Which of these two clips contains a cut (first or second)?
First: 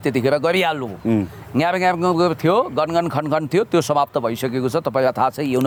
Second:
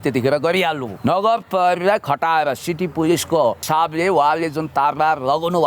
second